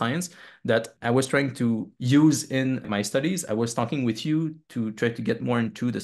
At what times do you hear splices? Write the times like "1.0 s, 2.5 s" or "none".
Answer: 0.9 s, 1.9 s, 2.8 s